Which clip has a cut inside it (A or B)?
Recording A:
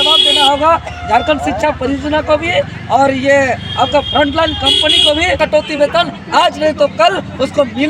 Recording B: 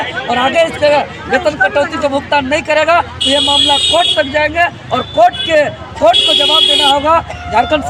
A